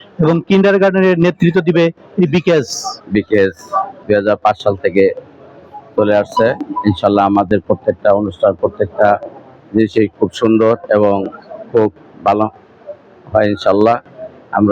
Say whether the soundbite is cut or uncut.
uncut